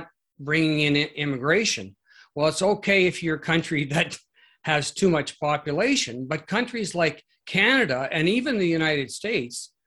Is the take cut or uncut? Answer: uncut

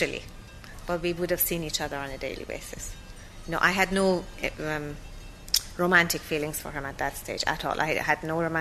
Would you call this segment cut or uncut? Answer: cut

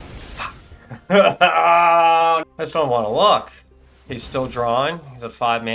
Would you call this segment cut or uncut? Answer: cut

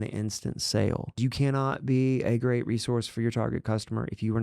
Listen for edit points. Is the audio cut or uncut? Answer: cut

